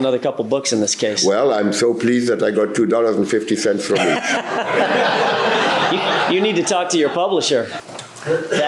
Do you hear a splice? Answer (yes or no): yes